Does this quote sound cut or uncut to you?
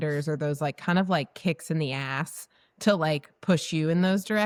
uncut